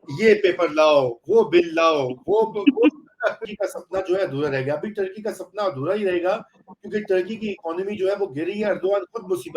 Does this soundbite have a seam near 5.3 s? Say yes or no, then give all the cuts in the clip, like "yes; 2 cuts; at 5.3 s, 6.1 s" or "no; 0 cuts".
no; 1 cut; at 3.5 s